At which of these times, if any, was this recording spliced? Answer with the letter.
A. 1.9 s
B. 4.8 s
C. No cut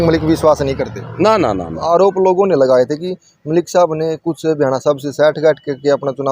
A